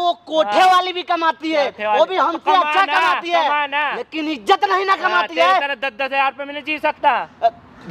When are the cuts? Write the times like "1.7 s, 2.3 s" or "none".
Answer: none